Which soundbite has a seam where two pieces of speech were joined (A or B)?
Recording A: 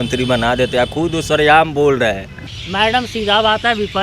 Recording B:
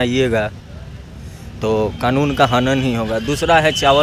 A